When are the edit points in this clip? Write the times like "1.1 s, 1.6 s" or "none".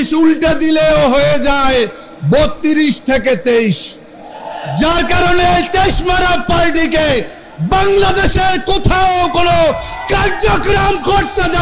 none